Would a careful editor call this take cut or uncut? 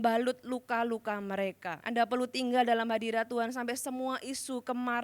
cut